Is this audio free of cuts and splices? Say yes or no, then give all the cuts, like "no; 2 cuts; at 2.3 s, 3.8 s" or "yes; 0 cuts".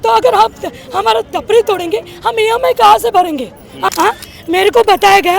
no; 1 cut; at 3.9 s